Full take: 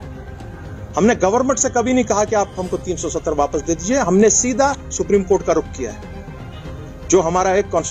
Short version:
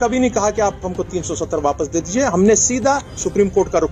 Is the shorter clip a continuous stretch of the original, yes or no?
yes